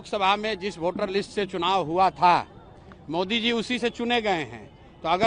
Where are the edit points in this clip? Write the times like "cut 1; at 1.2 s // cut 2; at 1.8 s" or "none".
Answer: none